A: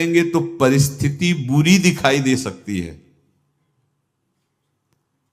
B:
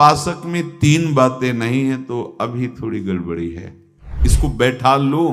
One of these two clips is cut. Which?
B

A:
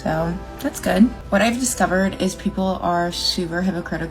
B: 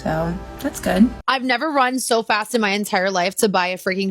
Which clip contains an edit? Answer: B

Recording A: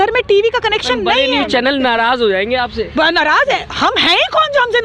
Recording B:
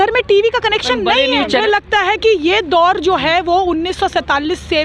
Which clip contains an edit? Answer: B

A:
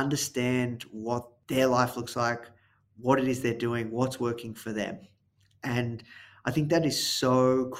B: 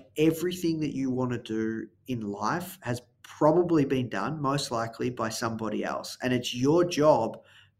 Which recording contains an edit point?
A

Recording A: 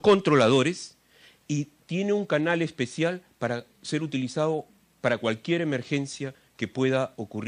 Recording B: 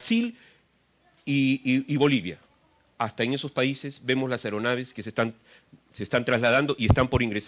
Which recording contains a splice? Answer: B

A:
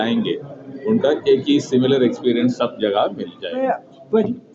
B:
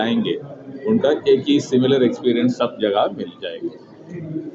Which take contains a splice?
A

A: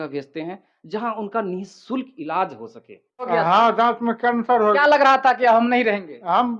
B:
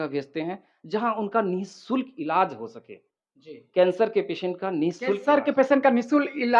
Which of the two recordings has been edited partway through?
A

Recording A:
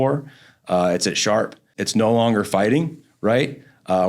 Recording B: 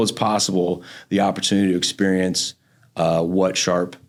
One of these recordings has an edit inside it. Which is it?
A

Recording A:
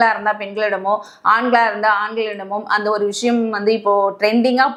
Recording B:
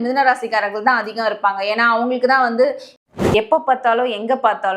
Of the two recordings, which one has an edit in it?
B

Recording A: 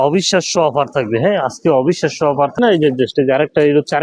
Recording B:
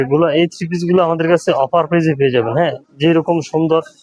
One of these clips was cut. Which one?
A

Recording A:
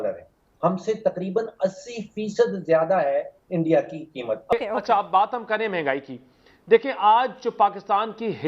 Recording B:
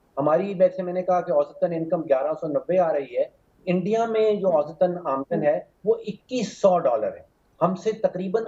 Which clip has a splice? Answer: A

